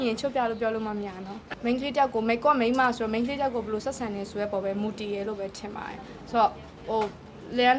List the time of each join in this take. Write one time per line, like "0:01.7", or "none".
0:01.4